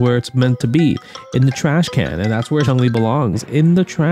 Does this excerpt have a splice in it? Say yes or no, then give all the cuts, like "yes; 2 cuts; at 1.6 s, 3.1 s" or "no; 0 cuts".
yes; 1 cut; at 2.7 s